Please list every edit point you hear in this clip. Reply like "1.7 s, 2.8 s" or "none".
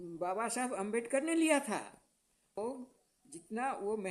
2.6 s